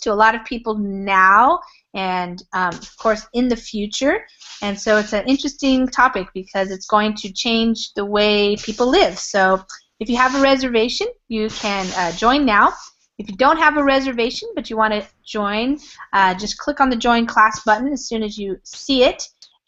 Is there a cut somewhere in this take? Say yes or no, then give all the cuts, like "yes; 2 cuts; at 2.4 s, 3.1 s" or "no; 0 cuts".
no; 0 cuts